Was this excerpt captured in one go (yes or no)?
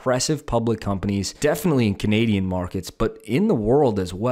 no